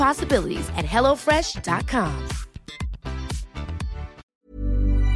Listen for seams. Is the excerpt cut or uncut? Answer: cut